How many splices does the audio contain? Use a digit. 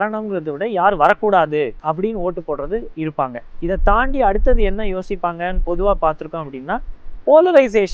2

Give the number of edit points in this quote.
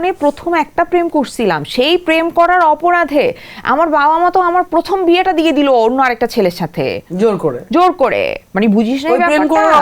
0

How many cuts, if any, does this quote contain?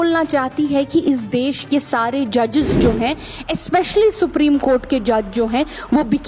0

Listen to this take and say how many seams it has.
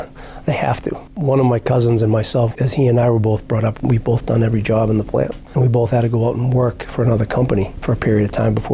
4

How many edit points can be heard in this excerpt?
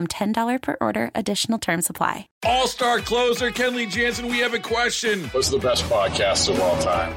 1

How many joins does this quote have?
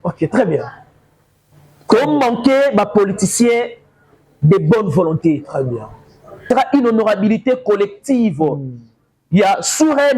1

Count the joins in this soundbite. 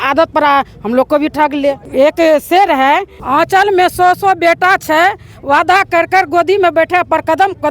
2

